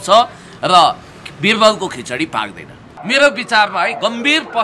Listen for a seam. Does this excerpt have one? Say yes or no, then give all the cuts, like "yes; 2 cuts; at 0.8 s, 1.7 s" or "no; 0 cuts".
yes; 1 cut; at 3.0 s